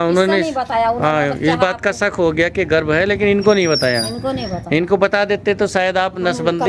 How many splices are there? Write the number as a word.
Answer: zero